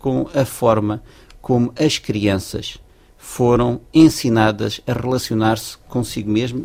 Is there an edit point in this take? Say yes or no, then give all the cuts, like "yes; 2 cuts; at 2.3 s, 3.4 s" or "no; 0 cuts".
no; 0 cuts